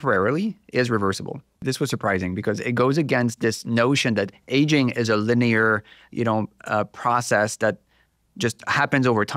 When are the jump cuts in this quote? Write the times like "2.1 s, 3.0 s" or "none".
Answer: 1.5 s